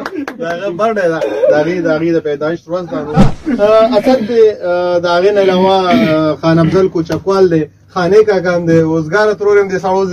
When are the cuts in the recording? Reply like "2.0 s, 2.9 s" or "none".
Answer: 3.3 s

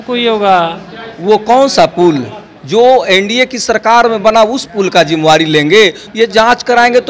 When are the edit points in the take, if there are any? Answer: 6.0 s

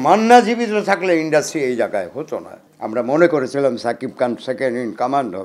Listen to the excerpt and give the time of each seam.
none

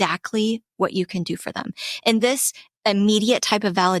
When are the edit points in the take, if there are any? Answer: none

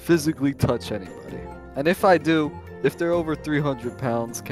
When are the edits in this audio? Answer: 2.6 s

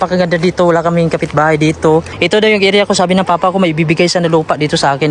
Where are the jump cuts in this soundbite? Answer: 2.1 s

